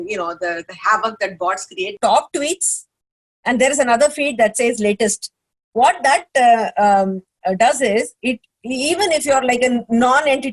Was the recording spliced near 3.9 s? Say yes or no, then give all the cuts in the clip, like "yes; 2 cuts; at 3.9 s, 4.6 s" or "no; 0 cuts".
no; 1 cut; at 1.9 s